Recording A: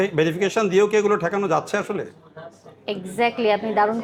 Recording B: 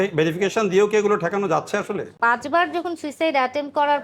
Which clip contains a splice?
B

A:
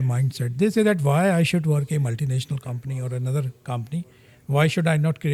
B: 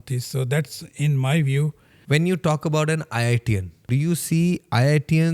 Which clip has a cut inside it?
B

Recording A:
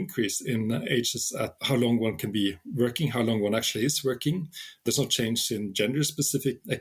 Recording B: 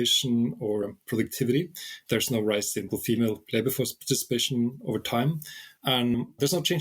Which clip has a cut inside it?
B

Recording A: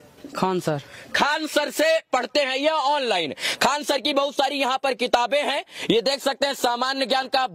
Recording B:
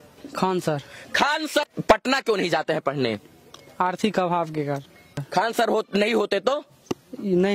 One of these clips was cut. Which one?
B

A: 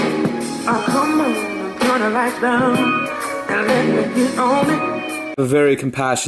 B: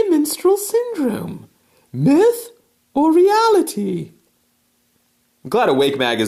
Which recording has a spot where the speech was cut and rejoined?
A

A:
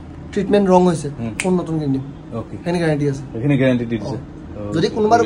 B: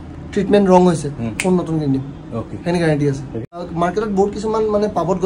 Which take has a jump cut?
B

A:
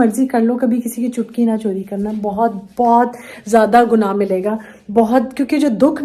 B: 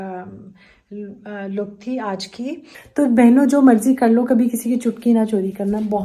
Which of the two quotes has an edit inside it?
B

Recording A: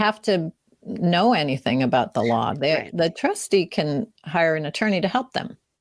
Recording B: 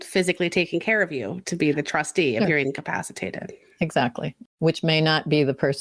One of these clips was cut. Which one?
B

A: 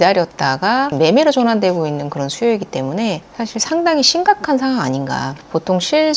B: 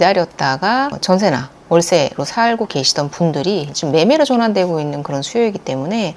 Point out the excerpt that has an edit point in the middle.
A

